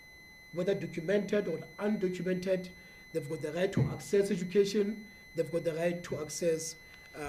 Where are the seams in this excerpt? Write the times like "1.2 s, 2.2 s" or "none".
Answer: none